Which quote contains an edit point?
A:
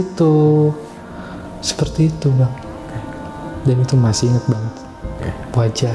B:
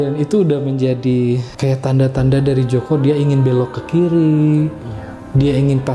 B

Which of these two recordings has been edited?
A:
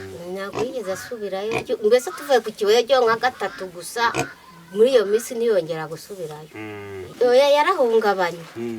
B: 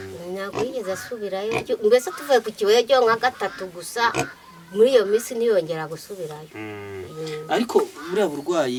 A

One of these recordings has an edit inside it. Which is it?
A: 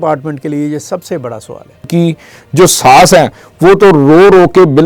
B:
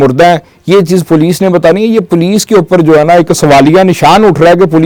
A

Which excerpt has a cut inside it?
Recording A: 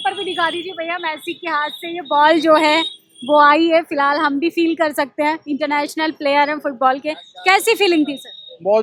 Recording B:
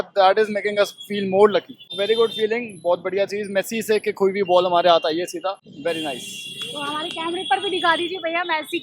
B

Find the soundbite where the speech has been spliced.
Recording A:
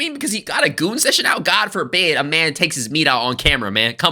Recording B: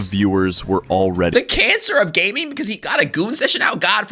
B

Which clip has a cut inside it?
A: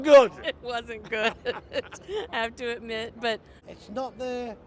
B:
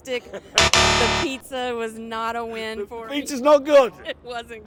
A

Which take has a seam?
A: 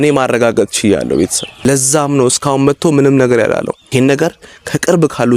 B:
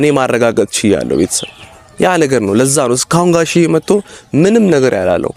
A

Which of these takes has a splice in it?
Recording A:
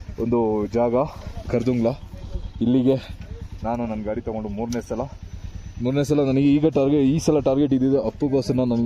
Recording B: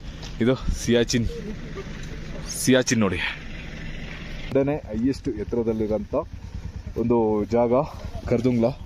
B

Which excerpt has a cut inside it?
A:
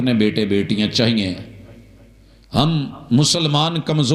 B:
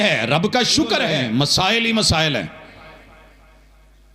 B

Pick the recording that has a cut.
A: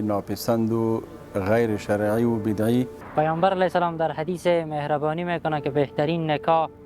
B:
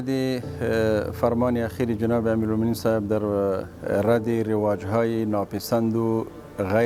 A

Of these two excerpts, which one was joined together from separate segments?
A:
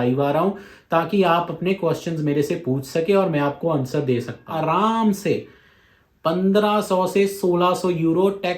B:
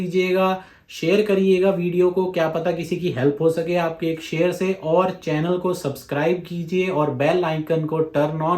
A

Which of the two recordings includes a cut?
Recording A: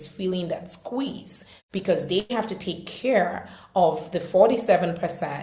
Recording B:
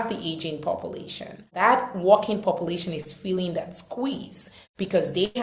B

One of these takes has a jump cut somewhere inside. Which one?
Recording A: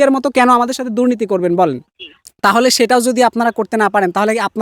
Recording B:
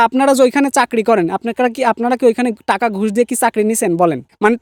A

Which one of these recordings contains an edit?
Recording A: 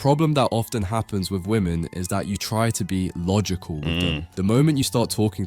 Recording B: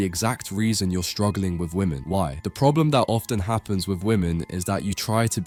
A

